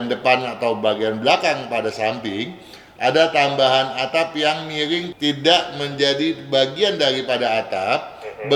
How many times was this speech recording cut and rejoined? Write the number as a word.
zero